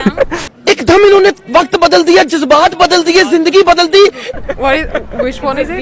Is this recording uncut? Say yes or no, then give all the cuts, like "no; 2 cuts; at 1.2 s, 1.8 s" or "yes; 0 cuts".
yes; 0 cuts